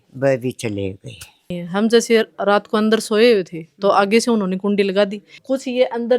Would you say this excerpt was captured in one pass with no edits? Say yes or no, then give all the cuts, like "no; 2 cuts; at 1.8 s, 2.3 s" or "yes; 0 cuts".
no; 2 cuts; at 1.6 s, 5.3 s